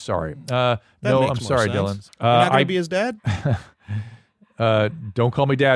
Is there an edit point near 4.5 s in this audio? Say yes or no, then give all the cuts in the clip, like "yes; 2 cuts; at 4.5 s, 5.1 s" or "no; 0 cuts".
no; 2 cuts; at 2.0 s, 3.3 s